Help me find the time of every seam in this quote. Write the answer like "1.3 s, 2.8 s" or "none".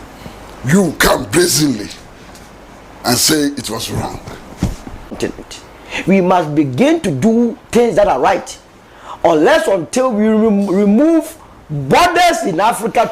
5.2 s